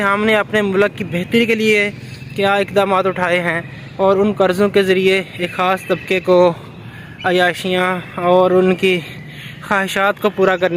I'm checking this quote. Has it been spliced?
no; 0 cuts

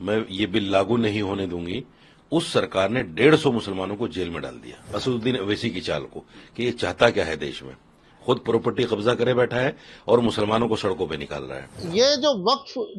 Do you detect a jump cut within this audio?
yes; 2 cuts; at 4.9 s, 11.8 s

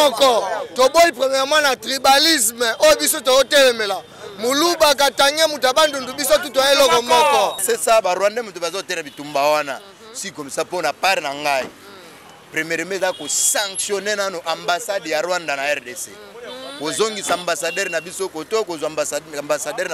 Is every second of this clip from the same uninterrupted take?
no; 1 cut; at 7.6 s

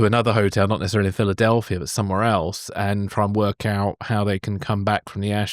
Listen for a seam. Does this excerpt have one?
no; 0 cuts

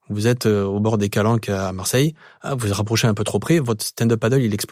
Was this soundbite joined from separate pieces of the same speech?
no; 0 cuts

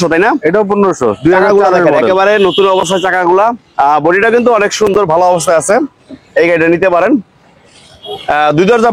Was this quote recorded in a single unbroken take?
yes; 0 cuts

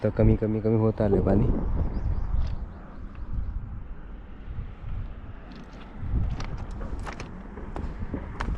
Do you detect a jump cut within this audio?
no; 0 cuts

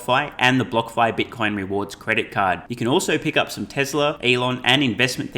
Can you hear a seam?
yes; 1 cut; at 4.2 s

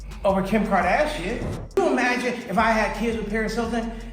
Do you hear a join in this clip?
yes; 1 cut; at 1.7 s

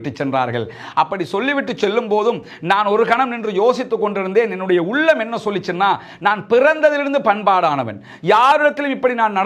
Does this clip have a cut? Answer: no; 0 cuts

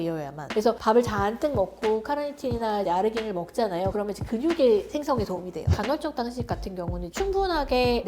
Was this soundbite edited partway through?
yes; 1 cut; at 5.7 s

